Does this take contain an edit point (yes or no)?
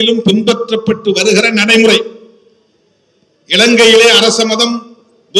no